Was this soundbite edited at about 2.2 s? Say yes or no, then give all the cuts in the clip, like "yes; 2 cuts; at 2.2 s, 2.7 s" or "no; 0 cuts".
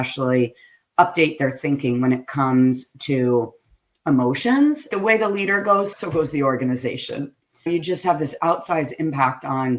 no; 3 cuts; at 4.9 s, 5.9 s, 7.7 s